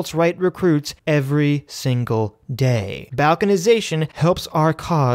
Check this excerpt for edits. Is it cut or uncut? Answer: cut